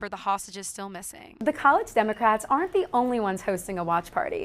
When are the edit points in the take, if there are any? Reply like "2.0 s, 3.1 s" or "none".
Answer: 1.3 s